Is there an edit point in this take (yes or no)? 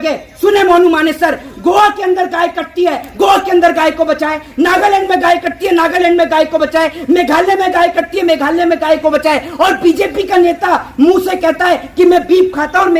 no